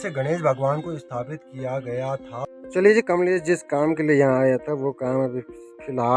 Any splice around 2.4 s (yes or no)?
yes